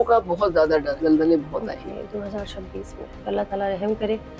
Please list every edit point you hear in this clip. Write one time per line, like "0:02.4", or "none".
0:00.9
0:03.2